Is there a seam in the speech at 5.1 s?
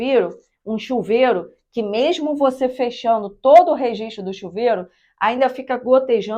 no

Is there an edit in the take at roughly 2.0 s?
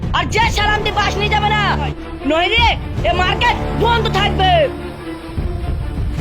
yes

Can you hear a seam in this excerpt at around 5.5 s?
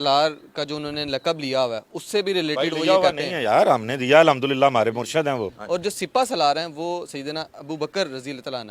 yes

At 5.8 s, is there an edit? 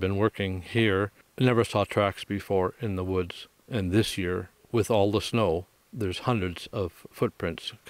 yes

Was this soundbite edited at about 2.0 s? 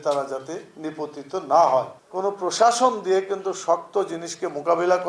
yes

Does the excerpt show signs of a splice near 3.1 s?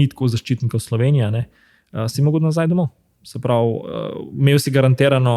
no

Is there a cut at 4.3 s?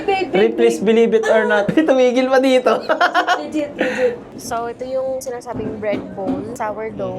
yes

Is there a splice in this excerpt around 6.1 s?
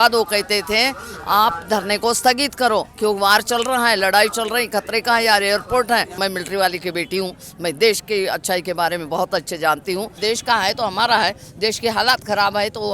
yes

